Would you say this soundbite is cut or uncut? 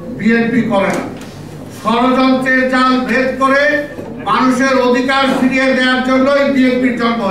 uncut